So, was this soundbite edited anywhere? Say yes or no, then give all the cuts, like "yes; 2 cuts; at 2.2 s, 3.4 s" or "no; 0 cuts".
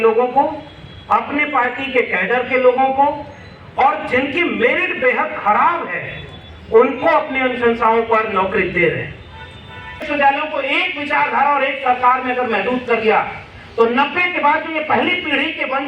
yes; 1 cut; at 10.0 s